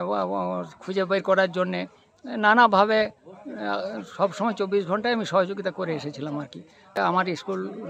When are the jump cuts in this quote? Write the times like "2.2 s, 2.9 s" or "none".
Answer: 7.0 s